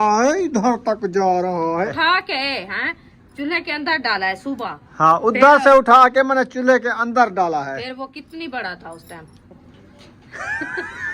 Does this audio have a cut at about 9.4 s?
yes; 3 cuts; at 1.9 s, 4.8 s, 9.4 s

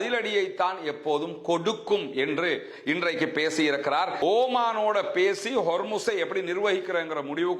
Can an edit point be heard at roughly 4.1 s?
yes; 1 cut; at 4.1 s

